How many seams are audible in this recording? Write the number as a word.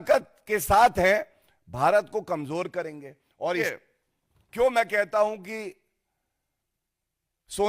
one